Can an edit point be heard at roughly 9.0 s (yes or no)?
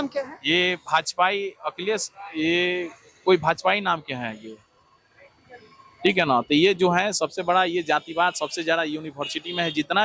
no